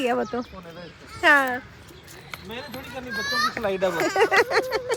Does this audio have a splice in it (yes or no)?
no